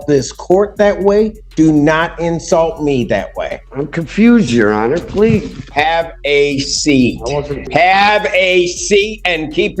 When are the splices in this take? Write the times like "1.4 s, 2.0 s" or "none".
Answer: 3.6 s, 5.7 s, 7.7 s